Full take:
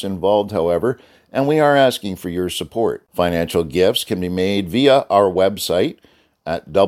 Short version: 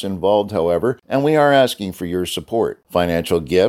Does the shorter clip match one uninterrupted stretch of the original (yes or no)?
no